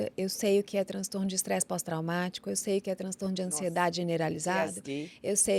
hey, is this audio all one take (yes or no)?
yes